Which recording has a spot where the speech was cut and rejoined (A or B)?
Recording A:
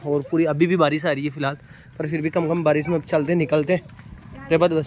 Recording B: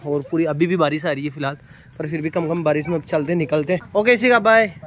B